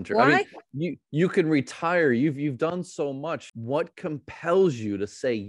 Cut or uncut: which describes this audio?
cut